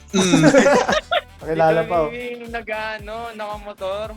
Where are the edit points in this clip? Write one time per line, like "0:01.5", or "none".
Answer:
0:01.3